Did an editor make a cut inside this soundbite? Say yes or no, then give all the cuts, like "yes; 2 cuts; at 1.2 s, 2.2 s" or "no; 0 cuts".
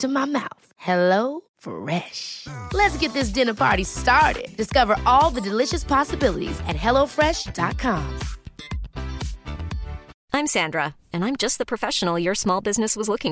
yes; 1 cut; at 10.2 s